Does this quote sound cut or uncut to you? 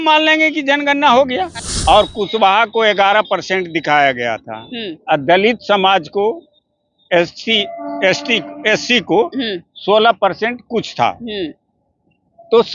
cut